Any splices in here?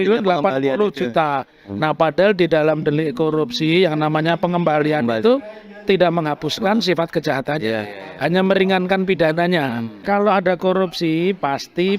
yes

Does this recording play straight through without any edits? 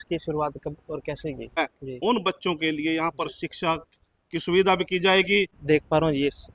no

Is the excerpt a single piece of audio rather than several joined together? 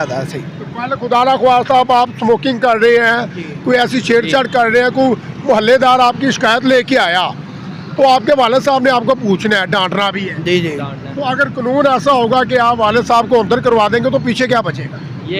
yes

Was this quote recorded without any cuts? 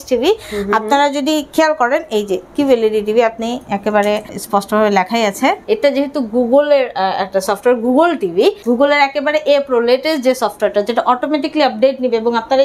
no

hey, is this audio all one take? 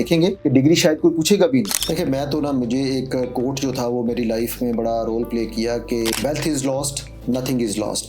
no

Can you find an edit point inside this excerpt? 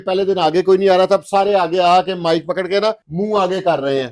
no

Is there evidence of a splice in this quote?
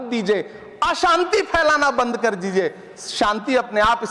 no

